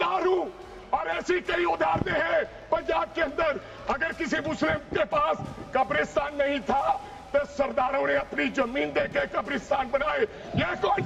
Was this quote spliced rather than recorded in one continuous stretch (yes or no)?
no